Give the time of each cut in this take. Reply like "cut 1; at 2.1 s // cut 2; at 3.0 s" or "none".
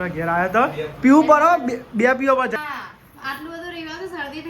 cut 1; at 2.6 s